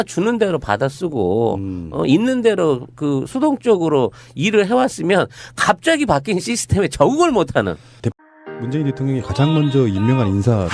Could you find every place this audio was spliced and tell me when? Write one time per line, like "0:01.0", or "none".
none